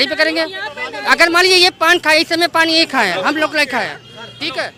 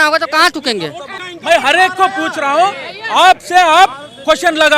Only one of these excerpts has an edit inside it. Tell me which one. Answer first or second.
second